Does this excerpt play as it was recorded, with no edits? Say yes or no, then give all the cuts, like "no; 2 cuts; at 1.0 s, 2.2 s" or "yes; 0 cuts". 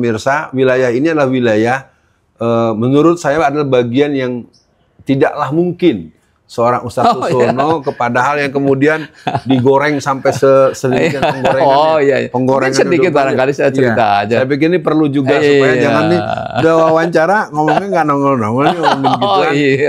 yes; 0 cuts